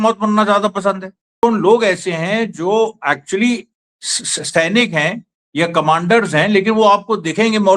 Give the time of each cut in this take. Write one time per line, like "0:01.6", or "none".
0:01.4